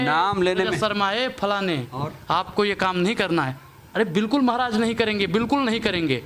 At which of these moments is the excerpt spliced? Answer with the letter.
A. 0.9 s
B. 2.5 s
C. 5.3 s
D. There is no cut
D